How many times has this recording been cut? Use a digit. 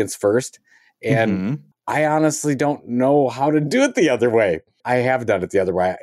2